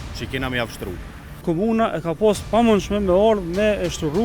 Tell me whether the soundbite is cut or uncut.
cut